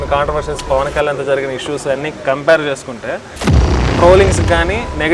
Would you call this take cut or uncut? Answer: cut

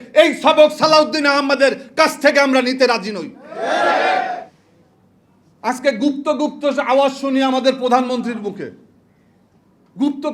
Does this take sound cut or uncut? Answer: cut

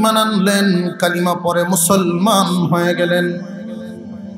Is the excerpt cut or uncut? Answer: cut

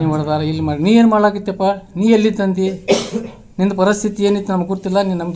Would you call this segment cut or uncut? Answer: uncut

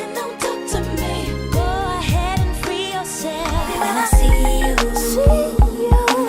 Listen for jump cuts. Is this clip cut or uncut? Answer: cut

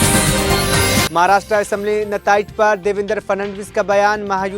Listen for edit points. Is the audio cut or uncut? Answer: cut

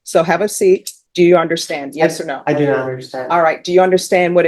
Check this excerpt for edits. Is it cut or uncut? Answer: cut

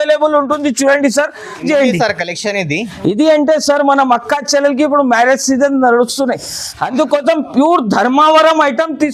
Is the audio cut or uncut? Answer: cut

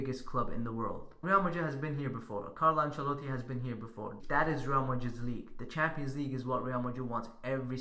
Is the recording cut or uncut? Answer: cut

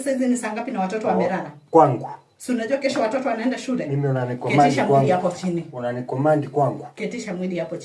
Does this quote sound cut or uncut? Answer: uncut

